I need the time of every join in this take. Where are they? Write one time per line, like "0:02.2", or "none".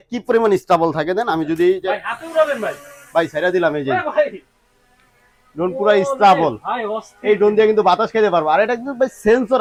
none

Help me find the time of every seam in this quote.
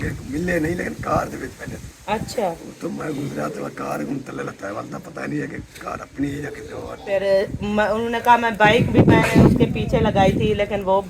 0:07.0

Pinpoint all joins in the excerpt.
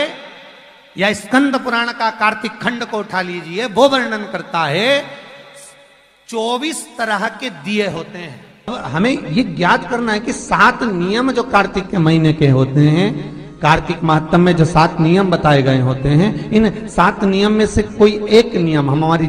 0:08.7

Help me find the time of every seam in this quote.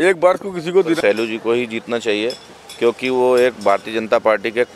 0:01.0

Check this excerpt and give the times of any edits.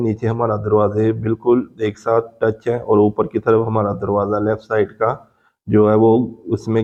none

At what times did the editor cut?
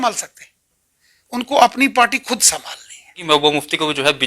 0:03.1

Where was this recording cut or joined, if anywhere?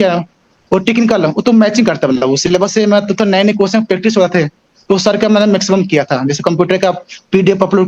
none

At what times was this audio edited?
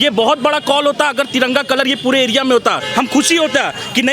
0:02.8

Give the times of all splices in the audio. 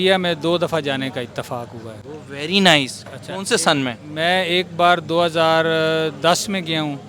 none

